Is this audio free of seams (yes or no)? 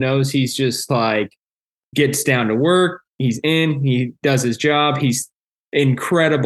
yes